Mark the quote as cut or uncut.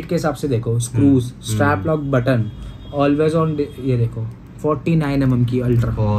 uncut